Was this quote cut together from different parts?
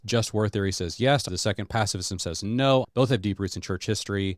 yes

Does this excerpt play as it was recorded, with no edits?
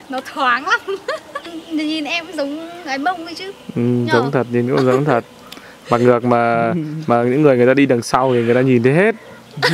no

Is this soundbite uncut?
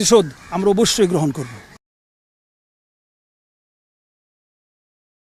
yes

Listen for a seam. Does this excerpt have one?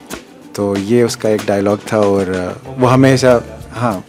no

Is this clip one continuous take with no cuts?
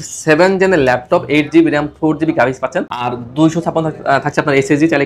yes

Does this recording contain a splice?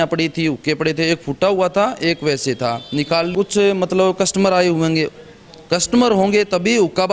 yes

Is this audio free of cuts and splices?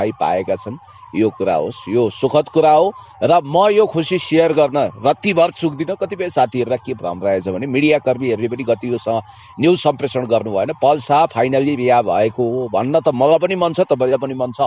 yes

